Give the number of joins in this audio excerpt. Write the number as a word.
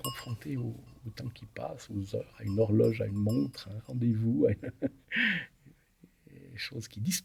zero